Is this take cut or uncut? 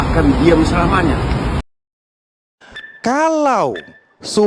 cut